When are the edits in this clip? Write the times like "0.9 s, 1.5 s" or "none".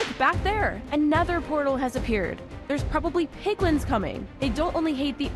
none